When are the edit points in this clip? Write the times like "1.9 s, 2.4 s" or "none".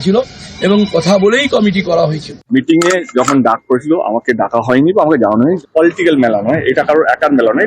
2.4 s, 5.6 s